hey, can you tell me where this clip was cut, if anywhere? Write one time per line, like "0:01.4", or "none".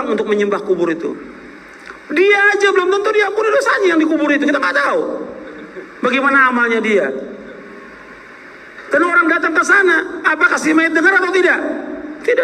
none